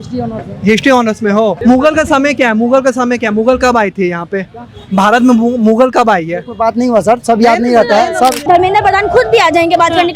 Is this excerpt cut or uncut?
cut